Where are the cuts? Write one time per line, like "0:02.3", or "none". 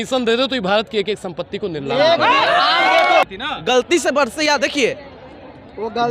0:03.2